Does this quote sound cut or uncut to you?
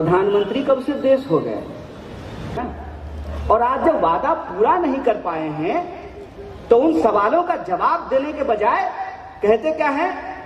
cut